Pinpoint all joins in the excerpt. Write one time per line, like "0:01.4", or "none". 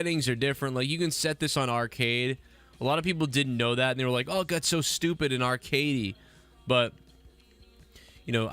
0:04.7